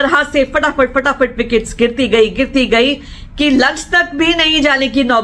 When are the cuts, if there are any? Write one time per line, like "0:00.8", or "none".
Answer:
none